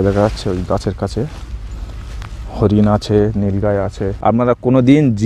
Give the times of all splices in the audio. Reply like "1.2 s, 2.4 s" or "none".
4.0 s